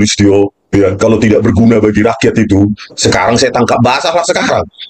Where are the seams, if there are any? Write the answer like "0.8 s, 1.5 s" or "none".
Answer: 3.0 s